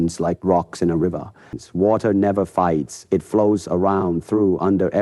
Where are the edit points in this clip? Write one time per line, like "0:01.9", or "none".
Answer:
0:01.5